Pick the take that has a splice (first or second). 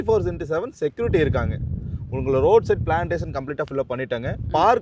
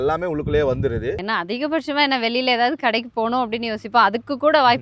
second